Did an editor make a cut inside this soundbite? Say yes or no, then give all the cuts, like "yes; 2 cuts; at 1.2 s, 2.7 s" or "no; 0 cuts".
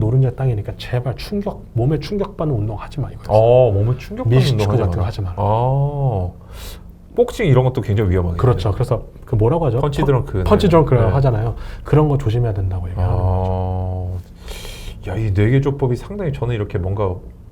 no; 0 cuts